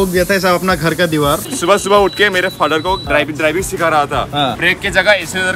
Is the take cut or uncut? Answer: cut